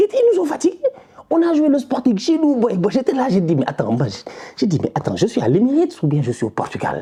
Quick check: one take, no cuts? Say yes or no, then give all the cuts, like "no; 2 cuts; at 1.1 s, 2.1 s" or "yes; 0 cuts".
yes; 0 cuts